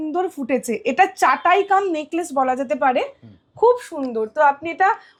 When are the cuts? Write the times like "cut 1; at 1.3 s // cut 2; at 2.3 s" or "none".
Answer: none